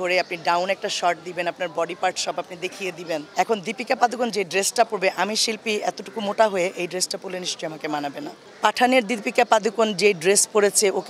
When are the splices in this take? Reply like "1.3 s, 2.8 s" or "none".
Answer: 3.3 s, 8.4 s